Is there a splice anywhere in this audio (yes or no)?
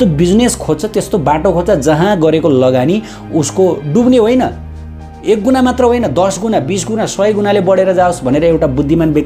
no